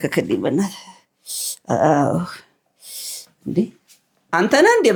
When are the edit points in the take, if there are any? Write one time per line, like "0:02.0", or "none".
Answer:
none